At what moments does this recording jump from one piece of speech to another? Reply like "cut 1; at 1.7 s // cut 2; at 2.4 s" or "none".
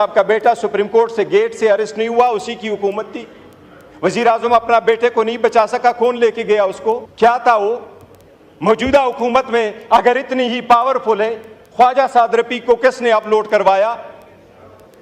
cut 1; at 7.1 s